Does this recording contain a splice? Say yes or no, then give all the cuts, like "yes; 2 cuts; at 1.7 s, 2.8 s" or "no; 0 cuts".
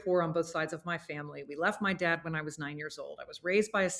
no; 0 cuts